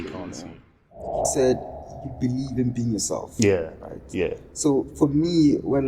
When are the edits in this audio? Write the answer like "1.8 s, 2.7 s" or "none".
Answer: 1.2 s